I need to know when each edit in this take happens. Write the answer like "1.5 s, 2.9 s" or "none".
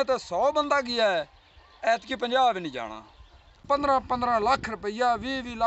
3.6 s